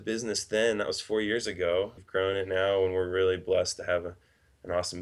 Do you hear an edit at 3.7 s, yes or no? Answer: no